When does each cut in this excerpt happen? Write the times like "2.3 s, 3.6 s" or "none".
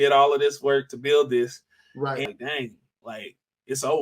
2.3 s